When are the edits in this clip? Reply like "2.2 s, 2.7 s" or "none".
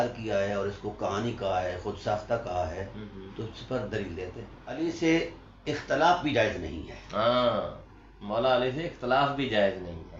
4.8 s